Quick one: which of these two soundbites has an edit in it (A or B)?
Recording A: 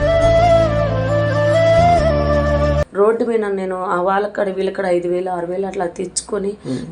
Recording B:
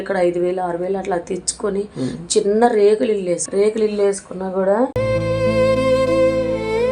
A